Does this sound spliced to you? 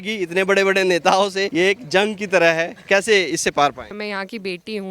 yes; 2 cuts; at 1.4 s, 3.9 s

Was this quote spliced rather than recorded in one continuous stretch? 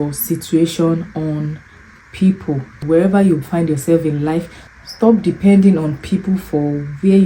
no; 0 cuts

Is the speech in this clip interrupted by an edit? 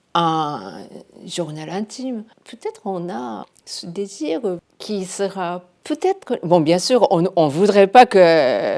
yes; 3 cuts; at 2.4 s, 3.5 s, 4.6 s

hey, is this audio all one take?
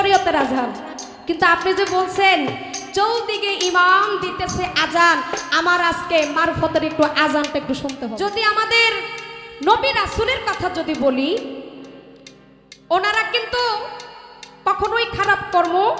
no; 1 cut; at 7.9 s

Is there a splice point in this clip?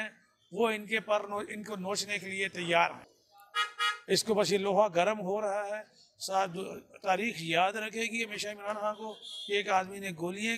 no; 0 cuts

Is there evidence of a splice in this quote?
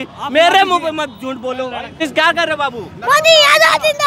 yes; 1 cut; at 2.0 s

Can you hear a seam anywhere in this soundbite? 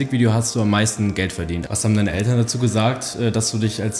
yes; 1 cut; at 1.7 s

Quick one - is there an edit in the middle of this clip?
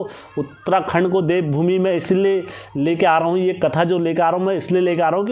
no; 0 cuts

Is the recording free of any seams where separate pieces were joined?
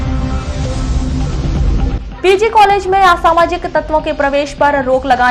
yes; 0 cuts

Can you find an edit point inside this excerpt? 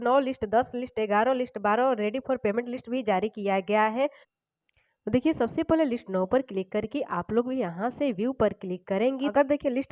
no; 0 cuts

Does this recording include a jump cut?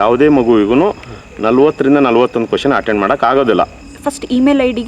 yes; 1 cut; at 3.7 s

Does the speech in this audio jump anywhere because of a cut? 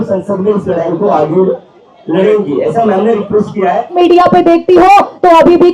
yes; 1 cut; at 4.0 s

